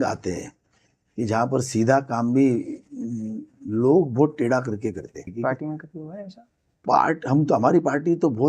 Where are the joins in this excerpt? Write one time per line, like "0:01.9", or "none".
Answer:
0:05.3

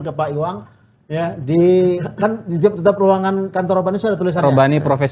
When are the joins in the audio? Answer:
none

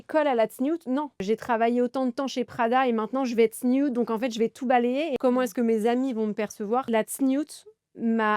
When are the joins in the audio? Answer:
0:01.2
0:05.1
0:06.9

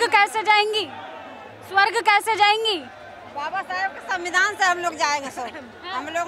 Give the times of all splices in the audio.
none

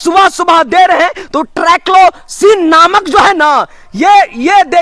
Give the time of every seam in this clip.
none

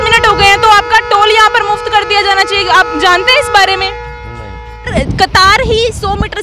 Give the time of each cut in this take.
0:04.9

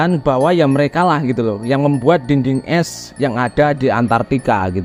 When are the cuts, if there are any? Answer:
none

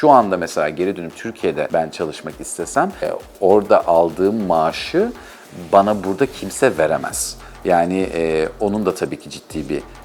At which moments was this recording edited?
0:01.7
0:03.0

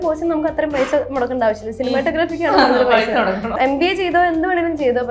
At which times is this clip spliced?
0:03.6

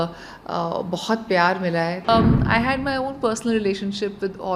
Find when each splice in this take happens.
0:02.1

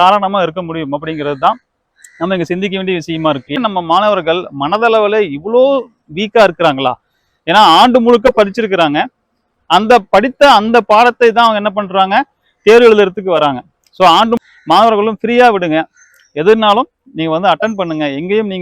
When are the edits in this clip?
0:03.6
0:14.4

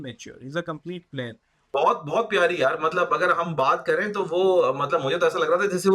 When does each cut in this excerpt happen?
0:01.5

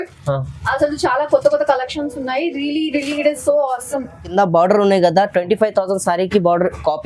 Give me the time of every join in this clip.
0:04.2

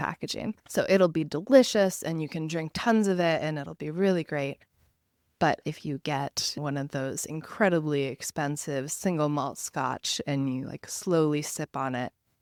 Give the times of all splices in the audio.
none

